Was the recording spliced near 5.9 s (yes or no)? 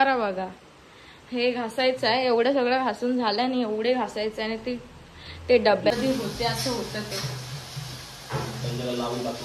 yes